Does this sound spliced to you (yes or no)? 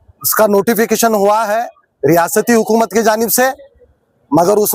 no